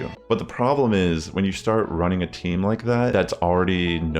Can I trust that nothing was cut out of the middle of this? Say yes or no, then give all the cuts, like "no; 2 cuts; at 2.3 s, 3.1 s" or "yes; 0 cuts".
no; 1 cut; at 3.1 s